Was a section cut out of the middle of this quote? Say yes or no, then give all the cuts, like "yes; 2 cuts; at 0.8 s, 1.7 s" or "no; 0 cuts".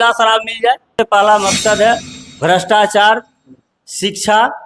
yes; 1 cut; at 1.0 s